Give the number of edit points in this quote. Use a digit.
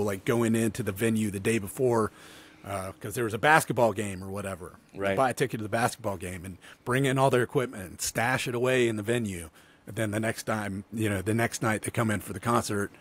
0